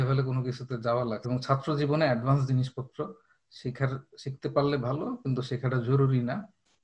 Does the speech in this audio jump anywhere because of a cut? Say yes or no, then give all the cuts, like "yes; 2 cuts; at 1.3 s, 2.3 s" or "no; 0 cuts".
yes; 1 cut; at 1.2 s